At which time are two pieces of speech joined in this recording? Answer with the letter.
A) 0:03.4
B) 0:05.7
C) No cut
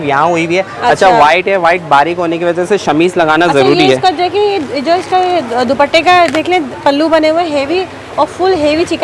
C